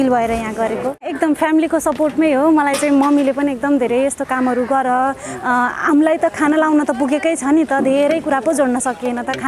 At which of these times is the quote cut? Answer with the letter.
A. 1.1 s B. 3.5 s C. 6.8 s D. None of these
A